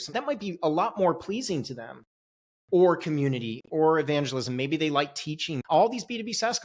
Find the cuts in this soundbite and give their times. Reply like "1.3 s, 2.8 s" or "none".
5.5 s